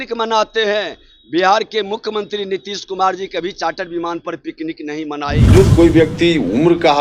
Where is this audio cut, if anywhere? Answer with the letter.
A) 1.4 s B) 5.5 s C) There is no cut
B